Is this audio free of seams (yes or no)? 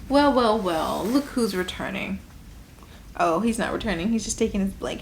yes